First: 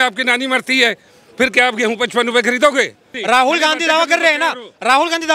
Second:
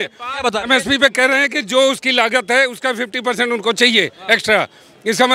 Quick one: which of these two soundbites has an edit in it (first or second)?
first